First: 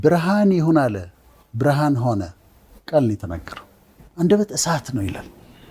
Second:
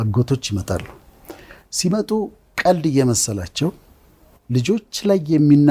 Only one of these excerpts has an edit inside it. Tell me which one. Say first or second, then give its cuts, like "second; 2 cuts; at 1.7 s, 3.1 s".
first; 1 cut; at 4.0 s